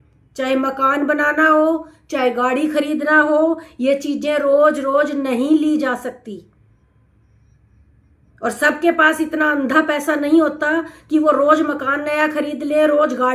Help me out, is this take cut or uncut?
uncut